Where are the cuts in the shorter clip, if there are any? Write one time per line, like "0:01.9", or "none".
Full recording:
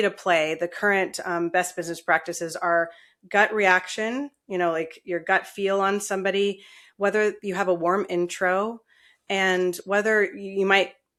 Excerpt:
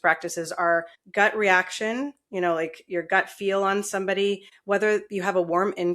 0:01.0
0:04.5